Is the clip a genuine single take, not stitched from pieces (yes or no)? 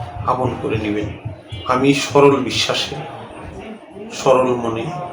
yes